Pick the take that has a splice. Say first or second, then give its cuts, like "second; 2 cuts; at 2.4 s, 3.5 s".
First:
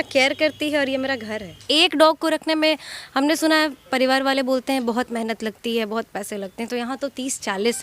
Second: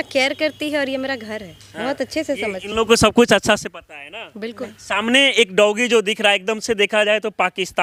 first; 1 cut; at 1.6 s